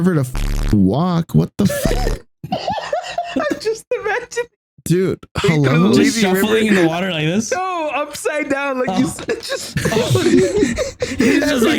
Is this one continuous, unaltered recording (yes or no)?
yes